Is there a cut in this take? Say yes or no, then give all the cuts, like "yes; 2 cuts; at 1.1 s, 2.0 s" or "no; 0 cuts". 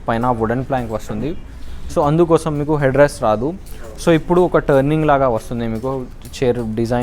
no; 0 cuts